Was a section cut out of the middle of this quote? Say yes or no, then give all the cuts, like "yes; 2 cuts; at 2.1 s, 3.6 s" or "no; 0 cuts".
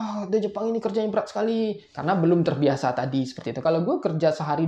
yes; 1 cut; at 3.6 s